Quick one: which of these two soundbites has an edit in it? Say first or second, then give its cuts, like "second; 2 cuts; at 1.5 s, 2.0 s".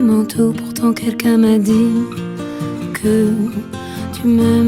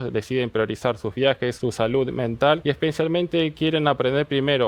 second; 2 cuts; at 1.5 s, 2.6 s